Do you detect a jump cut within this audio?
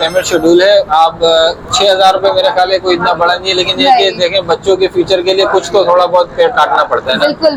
no; 0 cuts

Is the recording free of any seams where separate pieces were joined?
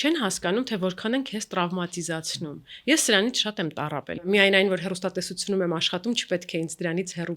no; 1 cut; at 4.0 s

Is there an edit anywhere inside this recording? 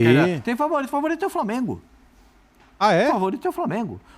no; 0 cuts

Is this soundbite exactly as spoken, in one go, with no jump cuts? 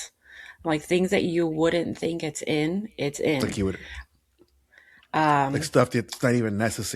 yes; 0 cuts

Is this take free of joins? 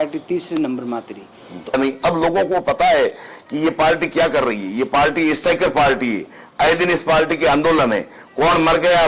no; 1 cut; at 1.7 s

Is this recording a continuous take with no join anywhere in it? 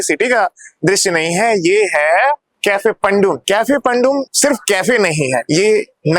no; 4 cuts; at 2.5 s, 3.4 s, 4.3 s, 5.4 s

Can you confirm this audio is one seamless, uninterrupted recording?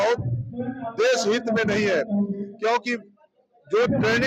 yes; 0 cuts

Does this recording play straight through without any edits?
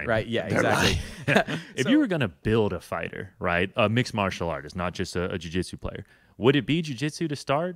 no; 1 cut; at 1.6 s

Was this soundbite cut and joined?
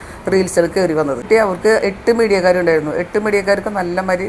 yes; 1 cut; at 1.2 s

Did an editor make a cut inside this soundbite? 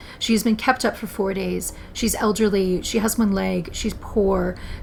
no; 0 cuts

